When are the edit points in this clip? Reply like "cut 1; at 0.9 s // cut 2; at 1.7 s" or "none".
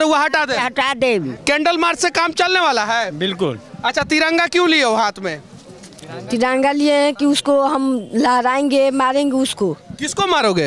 none